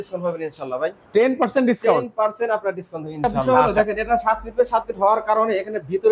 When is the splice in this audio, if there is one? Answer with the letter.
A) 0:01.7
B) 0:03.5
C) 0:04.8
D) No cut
B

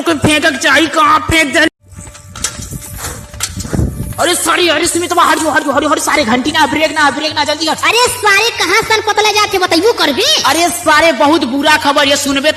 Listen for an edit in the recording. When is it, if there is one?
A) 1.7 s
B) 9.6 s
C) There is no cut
A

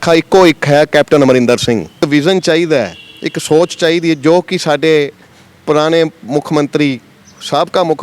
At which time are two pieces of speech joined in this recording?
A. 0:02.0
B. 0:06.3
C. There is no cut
A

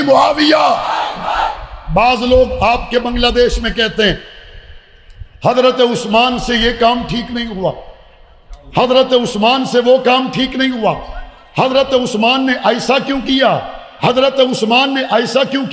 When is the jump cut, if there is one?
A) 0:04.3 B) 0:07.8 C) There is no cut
C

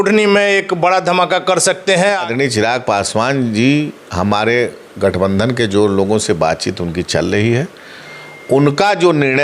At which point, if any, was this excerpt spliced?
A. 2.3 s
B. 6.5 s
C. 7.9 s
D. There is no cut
A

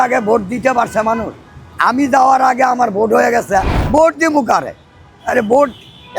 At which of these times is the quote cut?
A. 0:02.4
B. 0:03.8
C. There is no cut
B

